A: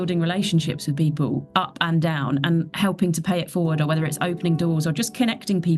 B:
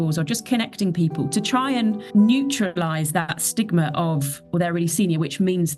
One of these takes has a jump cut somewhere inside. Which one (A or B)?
B